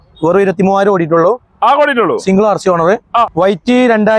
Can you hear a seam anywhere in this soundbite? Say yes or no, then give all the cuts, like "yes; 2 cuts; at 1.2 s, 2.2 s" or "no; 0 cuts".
yes; 1 cut; at 3.3 s